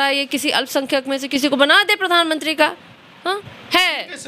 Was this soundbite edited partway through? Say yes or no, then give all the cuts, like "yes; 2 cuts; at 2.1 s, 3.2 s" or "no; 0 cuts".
no; 0 cuts